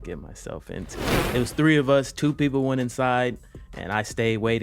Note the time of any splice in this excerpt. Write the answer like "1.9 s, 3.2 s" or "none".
1.2 s